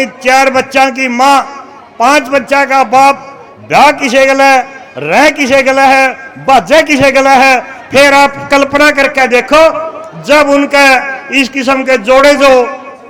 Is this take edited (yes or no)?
no